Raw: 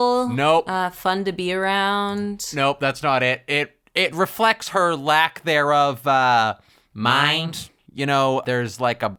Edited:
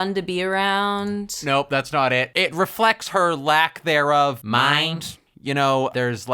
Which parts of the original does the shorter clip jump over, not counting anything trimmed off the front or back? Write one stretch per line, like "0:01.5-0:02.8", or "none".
0:03.4-0:03.9
0:06.0-0:06.9